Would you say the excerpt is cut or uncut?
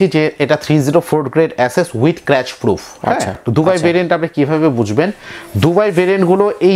cut